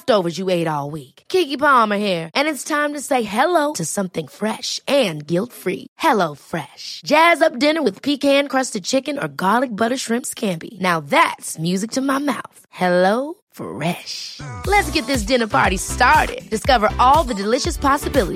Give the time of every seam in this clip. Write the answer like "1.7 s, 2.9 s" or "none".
none